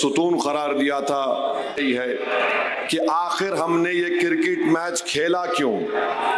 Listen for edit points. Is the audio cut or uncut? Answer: cut